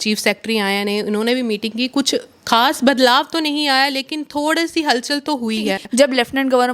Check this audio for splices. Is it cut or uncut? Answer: cut